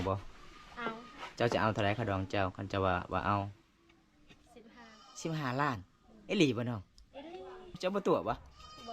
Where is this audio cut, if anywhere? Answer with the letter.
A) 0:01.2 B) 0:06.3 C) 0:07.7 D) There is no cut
C